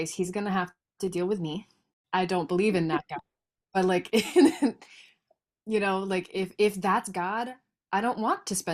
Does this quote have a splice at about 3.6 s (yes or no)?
no